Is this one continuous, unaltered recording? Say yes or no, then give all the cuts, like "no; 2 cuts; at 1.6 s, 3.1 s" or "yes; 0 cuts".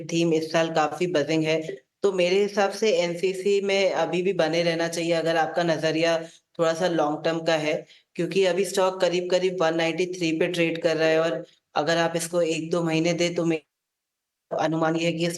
no; 1 cut; at 4.6 s